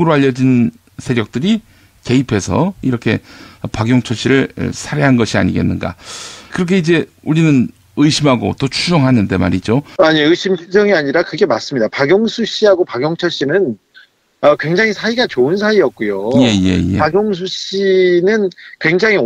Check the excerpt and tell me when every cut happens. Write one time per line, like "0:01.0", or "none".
none